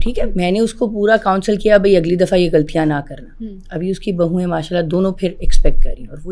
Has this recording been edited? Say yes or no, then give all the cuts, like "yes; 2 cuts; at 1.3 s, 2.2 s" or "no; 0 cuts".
no; 0 cuts